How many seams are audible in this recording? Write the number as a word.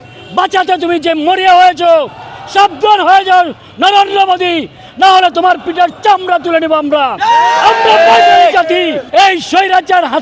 one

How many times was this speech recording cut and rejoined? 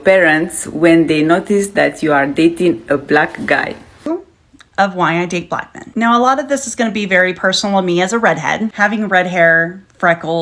one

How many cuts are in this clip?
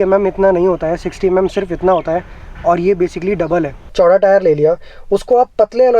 one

